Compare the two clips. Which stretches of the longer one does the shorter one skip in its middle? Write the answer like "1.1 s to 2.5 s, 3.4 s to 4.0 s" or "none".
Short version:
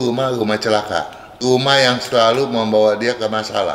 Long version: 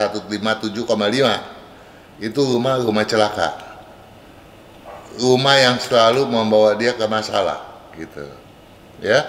3.7 s to 5.0 s